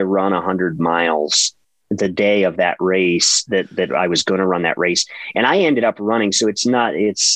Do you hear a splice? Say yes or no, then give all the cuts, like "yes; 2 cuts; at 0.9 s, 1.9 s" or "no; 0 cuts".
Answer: no; 0 cuts